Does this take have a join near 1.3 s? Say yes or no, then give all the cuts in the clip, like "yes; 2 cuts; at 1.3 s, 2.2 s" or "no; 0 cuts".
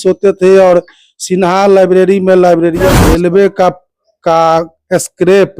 no; 1 cut; at 3.0 s